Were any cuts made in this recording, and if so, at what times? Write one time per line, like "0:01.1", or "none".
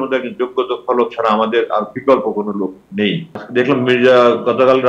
0:03.4